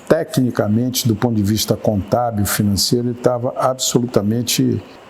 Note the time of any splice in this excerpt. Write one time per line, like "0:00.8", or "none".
none